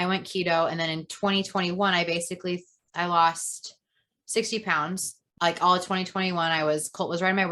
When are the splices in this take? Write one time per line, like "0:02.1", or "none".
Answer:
0:05.2